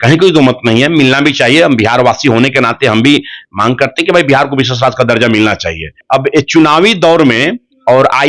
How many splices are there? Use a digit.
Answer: 1